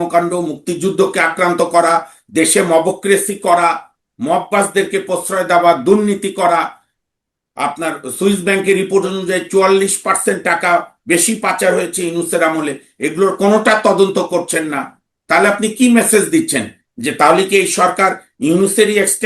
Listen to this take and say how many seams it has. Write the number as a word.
zero